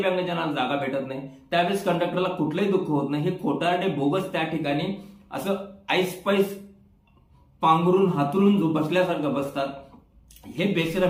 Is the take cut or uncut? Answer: uncut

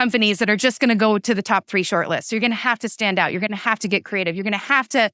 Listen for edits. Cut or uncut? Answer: uncut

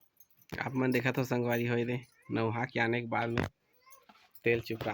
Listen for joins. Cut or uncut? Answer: uncut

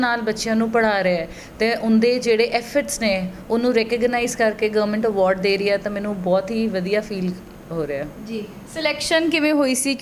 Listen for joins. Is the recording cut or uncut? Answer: uncut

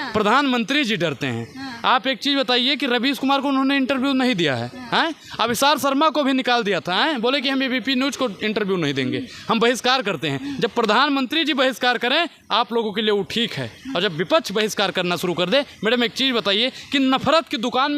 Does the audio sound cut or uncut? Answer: uncut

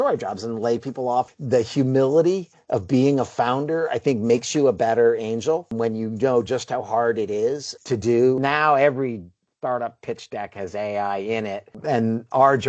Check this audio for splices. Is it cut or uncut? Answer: cut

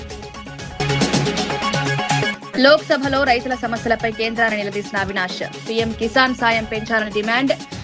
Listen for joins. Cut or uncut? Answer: cut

